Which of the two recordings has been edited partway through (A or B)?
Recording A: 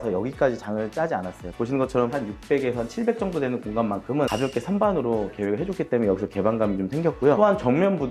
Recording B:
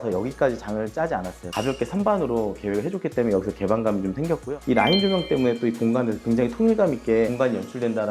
B